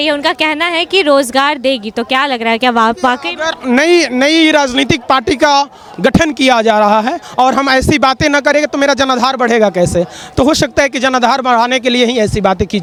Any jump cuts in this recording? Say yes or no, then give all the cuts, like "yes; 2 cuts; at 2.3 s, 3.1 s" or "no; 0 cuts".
no; 0 cuts